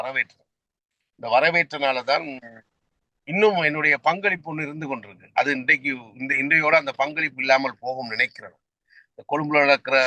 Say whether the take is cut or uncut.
uncut